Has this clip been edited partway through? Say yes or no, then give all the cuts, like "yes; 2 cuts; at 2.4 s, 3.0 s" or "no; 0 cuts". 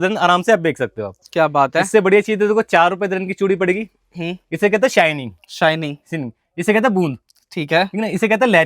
no; 0 cuts